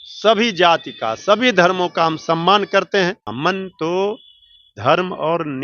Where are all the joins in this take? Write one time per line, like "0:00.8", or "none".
0:03.3